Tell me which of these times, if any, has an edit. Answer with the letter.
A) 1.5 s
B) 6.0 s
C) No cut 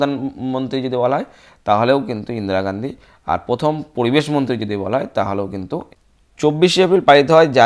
B